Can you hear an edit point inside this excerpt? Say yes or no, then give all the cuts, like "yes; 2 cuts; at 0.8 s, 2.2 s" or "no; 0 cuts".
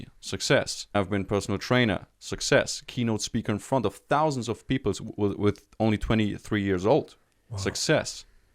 yes; 1 cut; at 0.9 s